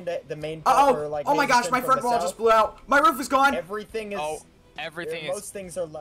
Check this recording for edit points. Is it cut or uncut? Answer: uncut